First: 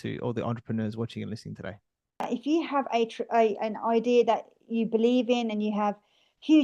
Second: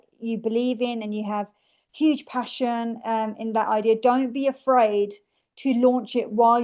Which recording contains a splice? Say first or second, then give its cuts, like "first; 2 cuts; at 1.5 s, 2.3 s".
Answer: first; 1 cut; at 2.3 s